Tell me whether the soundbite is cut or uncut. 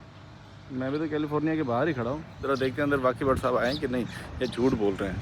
uncut